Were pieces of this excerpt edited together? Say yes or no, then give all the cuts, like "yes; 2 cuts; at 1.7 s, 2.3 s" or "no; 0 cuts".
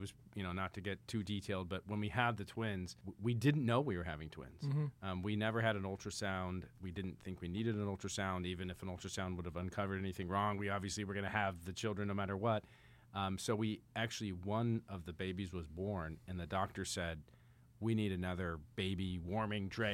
yes; 1 cut; at 3.1 s